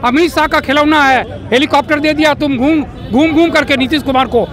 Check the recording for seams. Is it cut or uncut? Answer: uncut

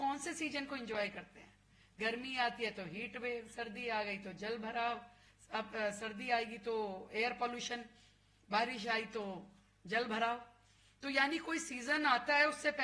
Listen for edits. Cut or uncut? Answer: uncut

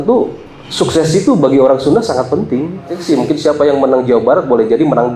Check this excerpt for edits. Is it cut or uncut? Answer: cut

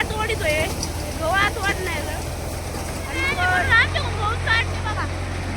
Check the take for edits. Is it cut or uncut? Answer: cut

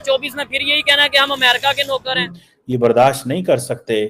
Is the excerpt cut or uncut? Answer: cut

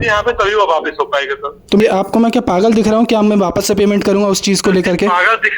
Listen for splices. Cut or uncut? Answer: cut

